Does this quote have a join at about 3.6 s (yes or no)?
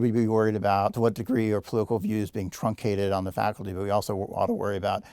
no